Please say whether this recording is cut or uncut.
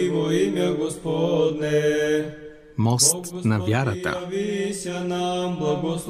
uncut